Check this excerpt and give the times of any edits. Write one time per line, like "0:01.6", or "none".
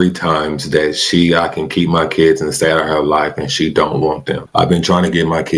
0:04.4